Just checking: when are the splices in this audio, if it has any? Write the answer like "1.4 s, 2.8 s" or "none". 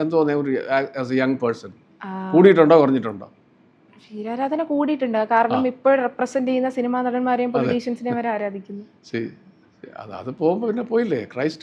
none